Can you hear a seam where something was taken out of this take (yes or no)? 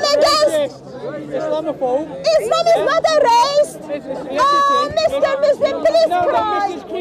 no